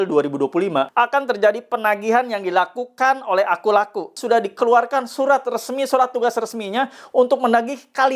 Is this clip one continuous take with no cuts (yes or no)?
no